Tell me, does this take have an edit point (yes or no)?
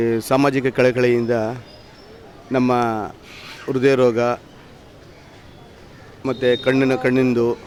no